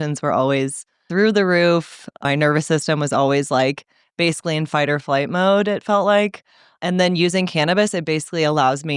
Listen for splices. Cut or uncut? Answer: cut